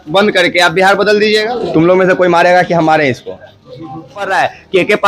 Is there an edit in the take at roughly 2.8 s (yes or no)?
no